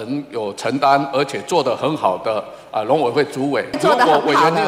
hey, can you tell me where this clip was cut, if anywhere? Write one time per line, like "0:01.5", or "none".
0:03.7